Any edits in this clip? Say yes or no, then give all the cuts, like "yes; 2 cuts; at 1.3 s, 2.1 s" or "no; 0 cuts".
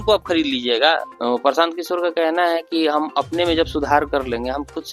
yes; 1 cut; at 1.1 s